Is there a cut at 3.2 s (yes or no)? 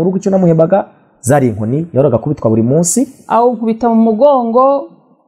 yes